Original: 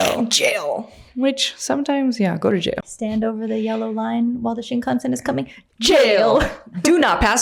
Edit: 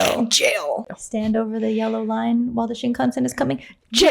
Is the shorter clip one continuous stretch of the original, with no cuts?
no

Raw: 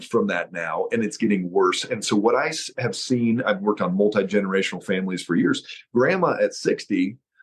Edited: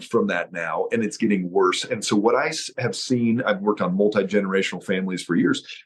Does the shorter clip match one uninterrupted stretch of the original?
yes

